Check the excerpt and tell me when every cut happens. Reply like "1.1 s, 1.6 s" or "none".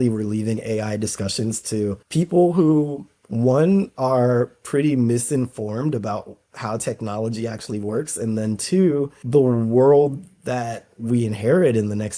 none